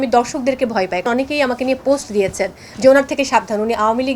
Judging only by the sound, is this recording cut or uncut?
cut